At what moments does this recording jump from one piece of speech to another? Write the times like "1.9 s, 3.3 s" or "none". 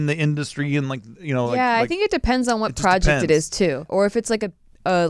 3.9 s